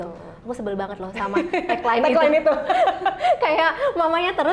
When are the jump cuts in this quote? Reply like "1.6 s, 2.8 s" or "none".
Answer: none